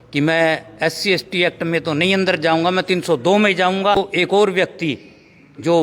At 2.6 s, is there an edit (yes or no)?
no